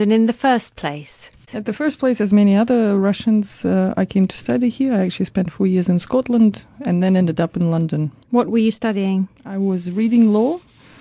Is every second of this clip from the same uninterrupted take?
no; 1 cut; at 4.1 s

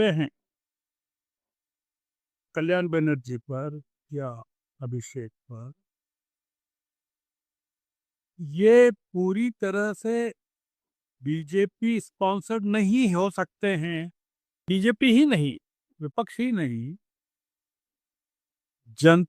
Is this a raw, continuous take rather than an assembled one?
no; 1 cut; at 14.6 s

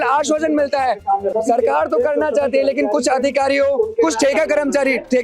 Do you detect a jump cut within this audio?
yes; 1 cut; at 1.3 s

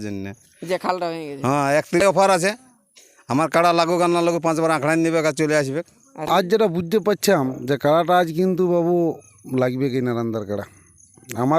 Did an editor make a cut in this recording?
yes; 2 cuts; at 2.0 s, 6.2 s

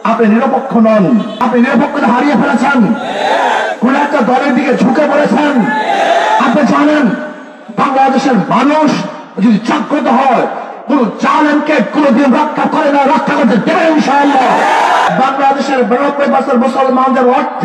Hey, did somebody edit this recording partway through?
yes; 2 cuts; at 1.4 s, 15.1 s

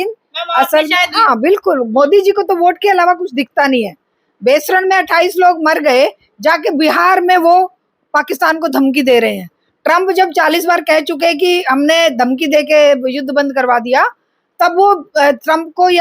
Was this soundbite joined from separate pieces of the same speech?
yes; 1 cut; at 1.1 s

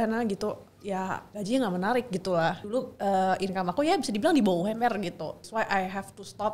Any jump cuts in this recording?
yes; 3 cuts; at 1.3 s, 2.6 s, 5.4 s

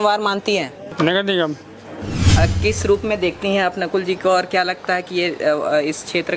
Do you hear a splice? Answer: yes; 2 cuts; at 0.8 s, 2.2 s

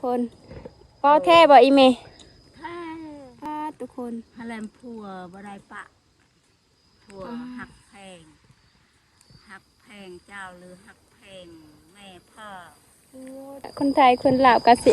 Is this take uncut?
no; 2 cuts; at 3.4 s, 13.7 s

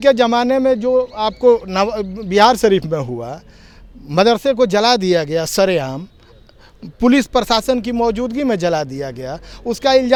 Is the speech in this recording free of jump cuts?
yes; 0 cuts

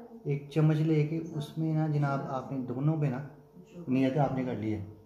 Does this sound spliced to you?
no; 0 cuts

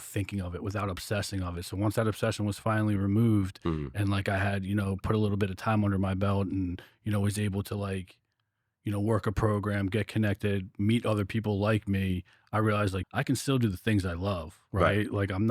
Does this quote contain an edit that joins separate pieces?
yes; 1 cut; at 13.0 s

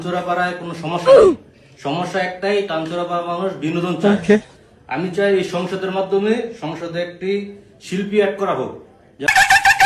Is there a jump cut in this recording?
no; 0 cuts

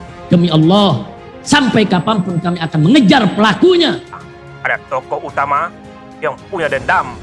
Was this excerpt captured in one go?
no; 1 cut; at 4.1 s

